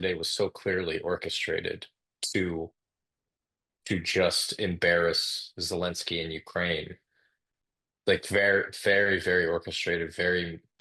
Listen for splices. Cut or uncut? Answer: uncut